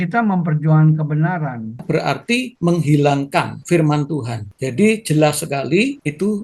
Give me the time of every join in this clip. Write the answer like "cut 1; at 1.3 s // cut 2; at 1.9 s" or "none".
cut 1; at 1.8 s